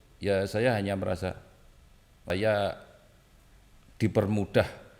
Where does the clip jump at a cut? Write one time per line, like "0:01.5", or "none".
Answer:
0:02.3